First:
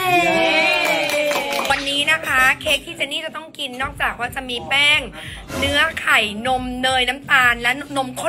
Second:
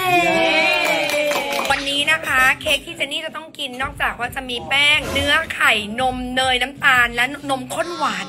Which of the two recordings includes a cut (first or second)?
second